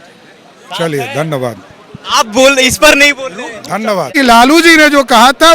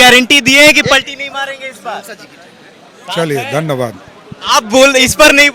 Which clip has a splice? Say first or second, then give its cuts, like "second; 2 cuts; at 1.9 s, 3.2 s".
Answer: first; 1 cut; at 4.1 s